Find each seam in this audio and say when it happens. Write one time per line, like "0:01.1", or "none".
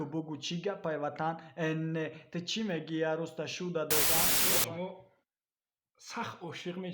0:04.4